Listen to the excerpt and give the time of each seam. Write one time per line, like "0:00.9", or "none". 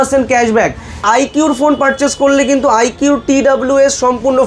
0:01.0